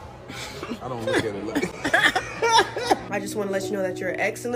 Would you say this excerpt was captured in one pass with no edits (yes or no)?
no